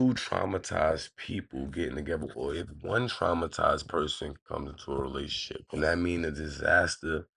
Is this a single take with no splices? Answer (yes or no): yes